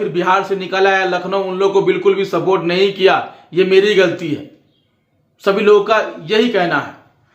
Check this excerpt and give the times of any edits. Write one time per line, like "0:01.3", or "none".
none